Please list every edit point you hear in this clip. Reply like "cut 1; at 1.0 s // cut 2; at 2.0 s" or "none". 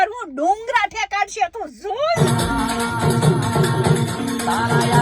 cut 1; at 2.2 s